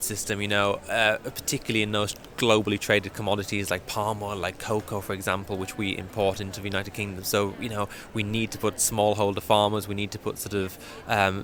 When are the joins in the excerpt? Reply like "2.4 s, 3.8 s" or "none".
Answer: none